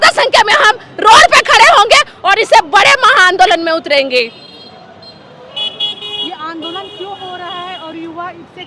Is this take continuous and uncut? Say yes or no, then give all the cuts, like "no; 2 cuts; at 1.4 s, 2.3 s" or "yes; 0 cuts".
yes; 0 cuts